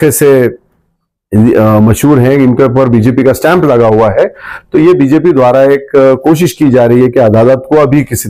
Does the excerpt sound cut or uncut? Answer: uncut